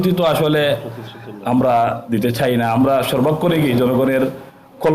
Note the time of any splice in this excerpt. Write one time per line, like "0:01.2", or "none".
none